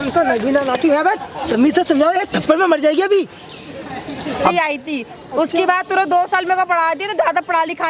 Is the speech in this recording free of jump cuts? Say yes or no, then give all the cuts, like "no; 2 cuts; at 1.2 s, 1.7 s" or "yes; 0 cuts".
no; 2 cuts; at 1.5 s, 4.5 s